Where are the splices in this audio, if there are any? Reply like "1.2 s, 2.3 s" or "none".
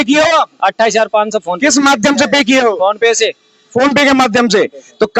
none